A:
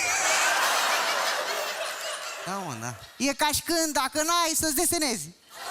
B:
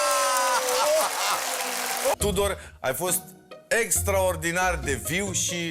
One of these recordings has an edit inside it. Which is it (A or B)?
B